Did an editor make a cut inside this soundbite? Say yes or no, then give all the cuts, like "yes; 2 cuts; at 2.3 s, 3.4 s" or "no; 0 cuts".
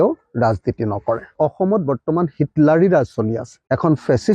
yes; 1 cut; at 1.3 s